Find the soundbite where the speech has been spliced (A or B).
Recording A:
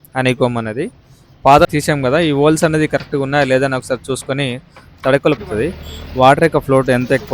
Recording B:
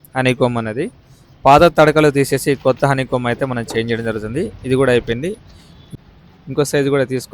A